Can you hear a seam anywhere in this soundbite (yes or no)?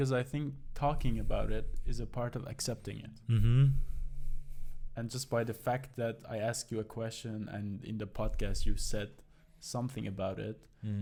no